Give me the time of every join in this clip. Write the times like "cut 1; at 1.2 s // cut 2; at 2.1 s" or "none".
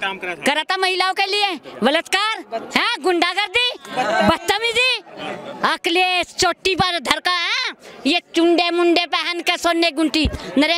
none

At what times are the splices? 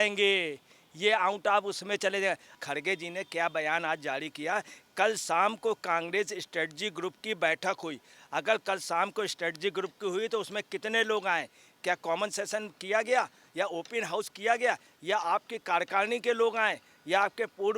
cut 1; at 2.6 s

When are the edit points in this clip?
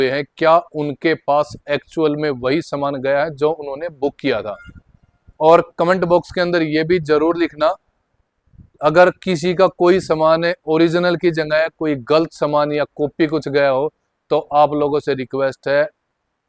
none

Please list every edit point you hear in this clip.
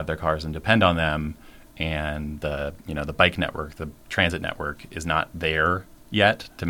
none

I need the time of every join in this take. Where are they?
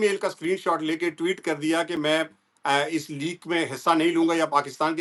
none

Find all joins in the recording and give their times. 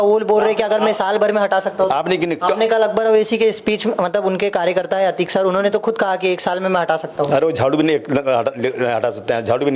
none

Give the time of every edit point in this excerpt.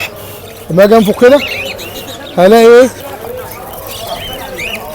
cut 1; at 3.1 s

